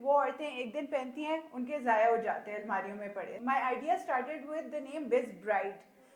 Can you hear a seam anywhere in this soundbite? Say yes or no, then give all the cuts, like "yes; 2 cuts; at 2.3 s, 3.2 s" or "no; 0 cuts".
yes; 1 cut; at 3.3 s